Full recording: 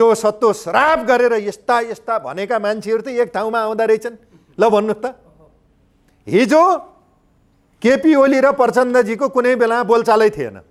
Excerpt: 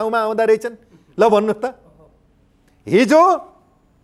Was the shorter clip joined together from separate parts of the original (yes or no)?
no